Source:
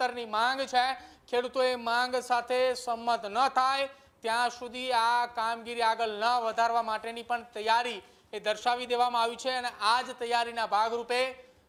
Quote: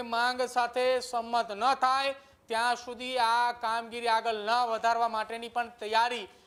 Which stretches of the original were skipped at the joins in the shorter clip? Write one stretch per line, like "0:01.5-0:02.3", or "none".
none